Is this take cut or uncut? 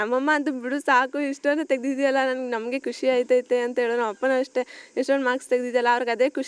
uncut